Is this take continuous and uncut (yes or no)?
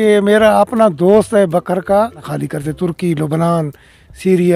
no